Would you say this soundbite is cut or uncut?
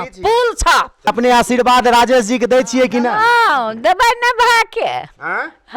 cut